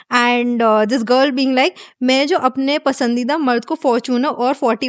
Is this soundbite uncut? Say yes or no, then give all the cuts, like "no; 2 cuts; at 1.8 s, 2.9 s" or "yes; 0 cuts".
yes; 0 cuts